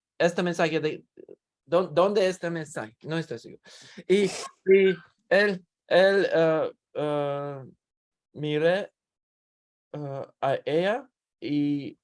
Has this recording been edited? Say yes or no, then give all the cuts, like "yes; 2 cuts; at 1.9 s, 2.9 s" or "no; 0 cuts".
no; 0 cuts